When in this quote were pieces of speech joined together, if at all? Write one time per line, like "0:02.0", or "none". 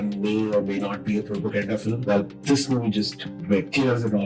none